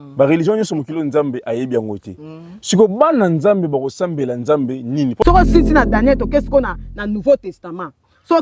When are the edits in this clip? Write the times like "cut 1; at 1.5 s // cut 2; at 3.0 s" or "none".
cut 1; at 5.2 s